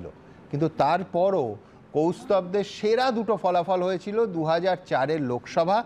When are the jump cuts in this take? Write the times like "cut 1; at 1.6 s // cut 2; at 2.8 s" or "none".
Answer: none